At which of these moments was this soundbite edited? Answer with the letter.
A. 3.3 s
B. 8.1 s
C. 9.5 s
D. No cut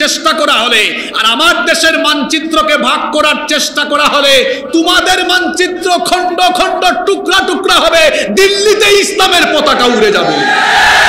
D